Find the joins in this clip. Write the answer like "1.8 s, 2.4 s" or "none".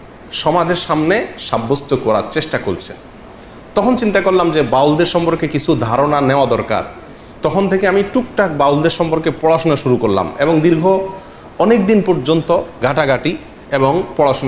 none

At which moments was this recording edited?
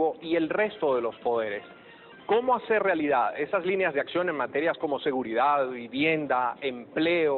5.4 s

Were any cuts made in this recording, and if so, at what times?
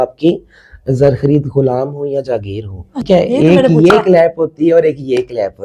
3.1 s

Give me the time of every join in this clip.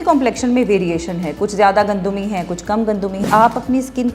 3.2 s

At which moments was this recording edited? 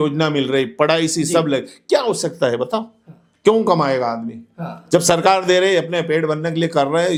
none

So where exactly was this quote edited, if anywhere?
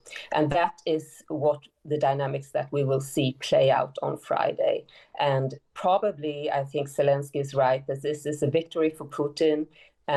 none

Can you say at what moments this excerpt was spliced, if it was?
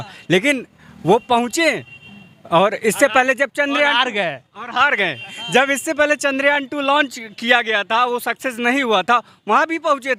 none

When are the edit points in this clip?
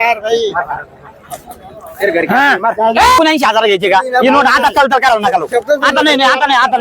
3.2 s

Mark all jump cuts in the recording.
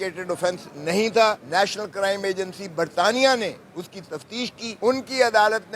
1.4 s, 4.7 s

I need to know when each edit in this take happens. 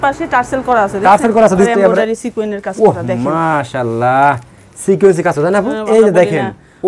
1.7 s, 5.8 s

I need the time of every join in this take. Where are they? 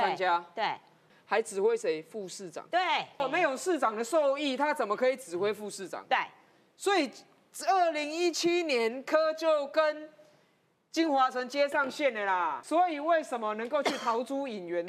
1.0 s, 3.2 s, 12.6 s

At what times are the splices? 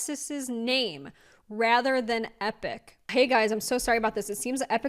3.0 s

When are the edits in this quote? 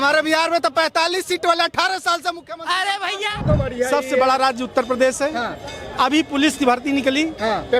3.4 s

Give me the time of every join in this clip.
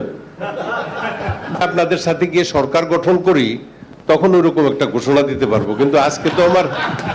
1.6 s

